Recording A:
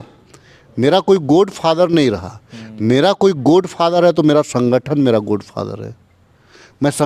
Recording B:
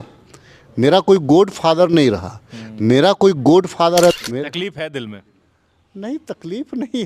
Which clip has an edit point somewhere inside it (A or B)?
B